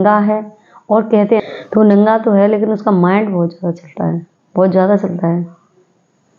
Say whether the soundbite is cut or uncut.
cut